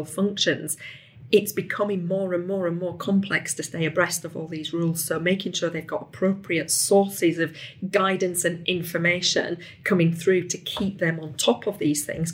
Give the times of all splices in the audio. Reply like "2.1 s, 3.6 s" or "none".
none